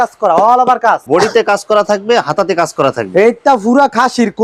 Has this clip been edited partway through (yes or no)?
no